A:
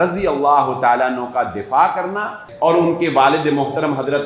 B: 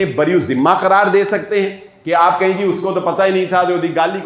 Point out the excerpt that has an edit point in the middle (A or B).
A